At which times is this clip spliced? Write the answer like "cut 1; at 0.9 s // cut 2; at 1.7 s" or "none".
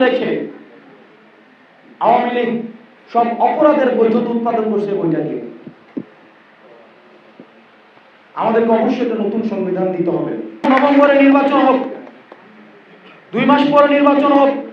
cut 1; at 10.7 s